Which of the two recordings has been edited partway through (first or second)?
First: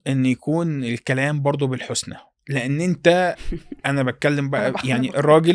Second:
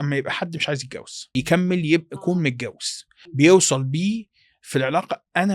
second